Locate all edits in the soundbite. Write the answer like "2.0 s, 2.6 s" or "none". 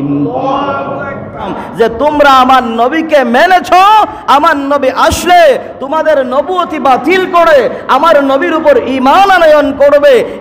1.6 s